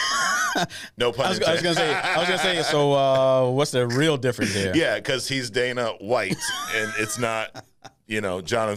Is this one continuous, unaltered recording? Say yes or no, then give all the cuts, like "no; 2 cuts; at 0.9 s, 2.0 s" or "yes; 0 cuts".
yes; 0 cuts